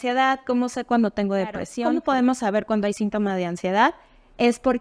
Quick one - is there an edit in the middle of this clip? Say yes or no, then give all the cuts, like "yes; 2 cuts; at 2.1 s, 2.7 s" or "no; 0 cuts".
yes; 1 cut; at 1.7 s